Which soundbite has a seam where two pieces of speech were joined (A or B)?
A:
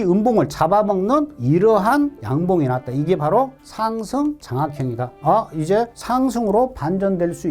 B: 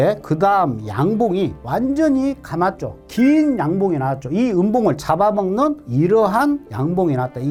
A